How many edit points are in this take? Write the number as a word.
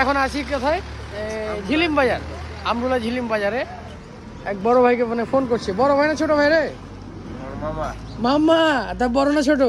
zero